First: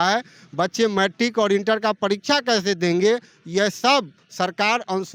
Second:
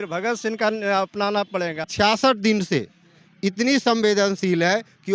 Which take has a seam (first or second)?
second